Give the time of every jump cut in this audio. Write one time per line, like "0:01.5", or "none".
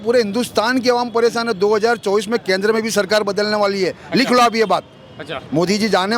none